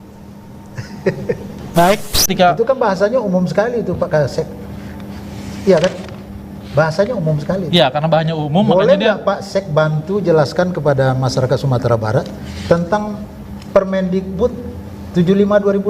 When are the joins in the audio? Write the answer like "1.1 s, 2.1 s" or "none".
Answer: 2.3 s